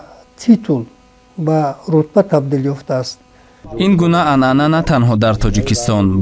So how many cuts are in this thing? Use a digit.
1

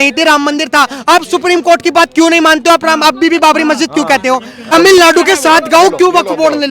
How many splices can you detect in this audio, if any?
1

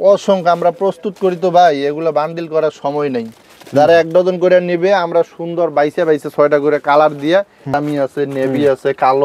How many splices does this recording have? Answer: 1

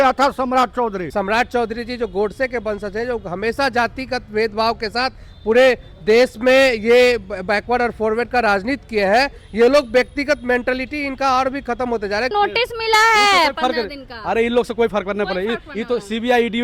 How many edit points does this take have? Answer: 2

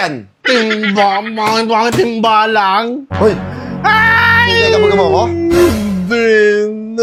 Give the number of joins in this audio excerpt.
0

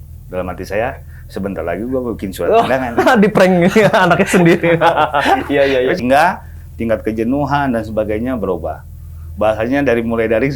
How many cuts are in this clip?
1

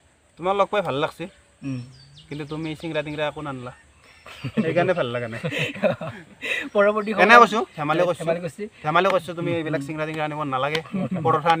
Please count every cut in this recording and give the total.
0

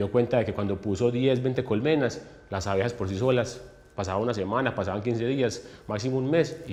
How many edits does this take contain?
0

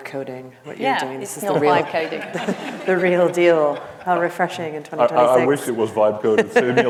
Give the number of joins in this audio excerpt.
0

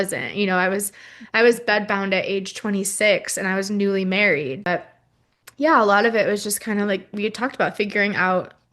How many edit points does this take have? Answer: 1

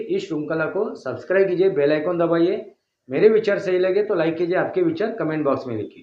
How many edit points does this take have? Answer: 0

